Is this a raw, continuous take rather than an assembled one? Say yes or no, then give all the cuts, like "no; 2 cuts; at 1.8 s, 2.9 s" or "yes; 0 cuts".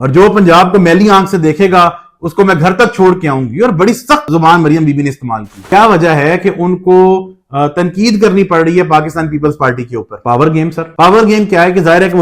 no; 3 cuts; at 4.3 s, 5.6 s, 10.8 s